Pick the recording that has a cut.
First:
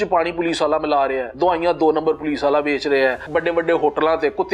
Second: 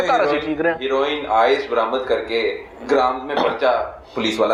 first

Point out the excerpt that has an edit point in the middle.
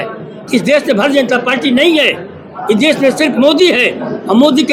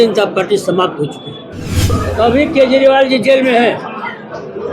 second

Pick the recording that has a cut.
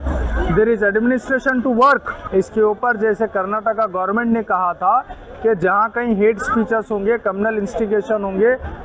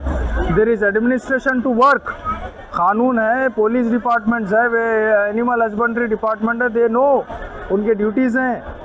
first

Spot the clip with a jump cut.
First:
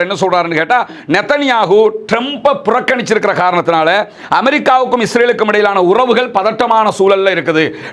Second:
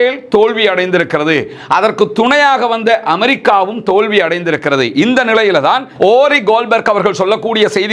second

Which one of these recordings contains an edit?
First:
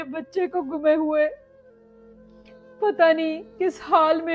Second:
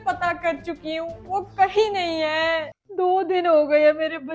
second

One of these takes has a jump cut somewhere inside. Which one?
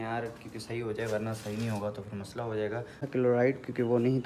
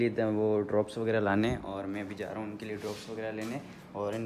first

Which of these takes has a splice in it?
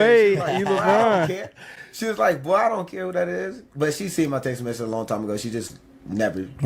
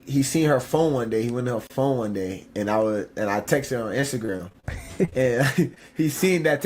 second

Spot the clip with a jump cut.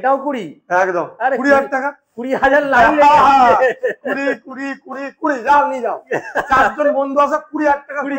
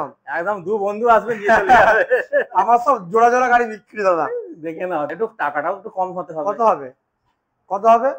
second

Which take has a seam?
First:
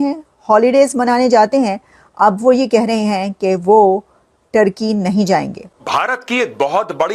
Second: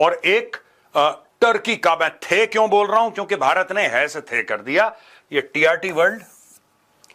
first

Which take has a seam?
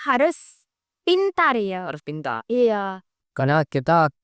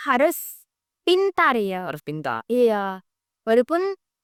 first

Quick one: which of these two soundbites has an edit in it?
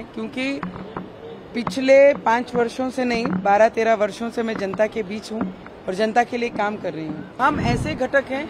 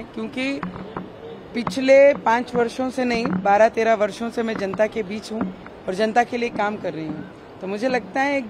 first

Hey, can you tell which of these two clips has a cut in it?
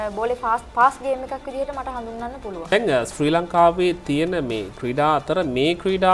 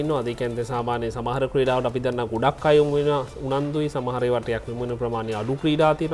first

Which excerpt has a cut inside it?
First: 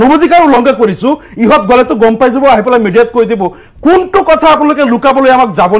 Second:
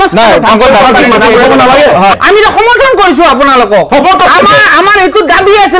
second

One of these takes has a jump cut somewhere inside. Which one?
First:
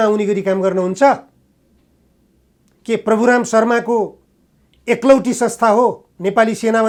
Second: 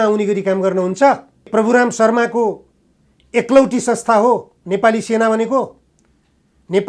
second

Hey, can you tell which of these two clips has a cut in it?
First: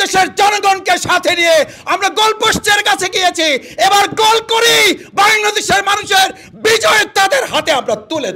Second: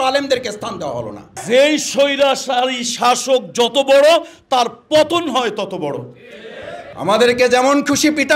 second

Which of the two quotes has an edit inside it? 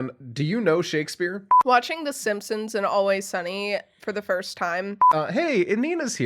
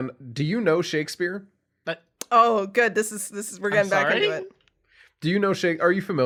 first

